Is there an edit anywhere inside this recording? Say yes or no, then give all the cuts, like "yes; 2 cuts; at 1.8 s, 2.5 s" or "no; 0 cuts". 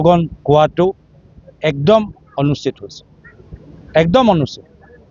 no; 0 cuts